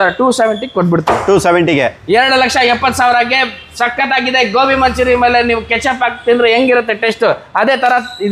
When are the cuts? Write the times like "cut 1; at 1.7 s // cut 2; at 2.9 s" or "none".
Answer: none